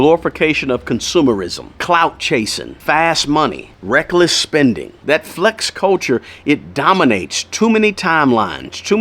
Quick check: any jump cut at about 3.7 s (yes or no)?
yes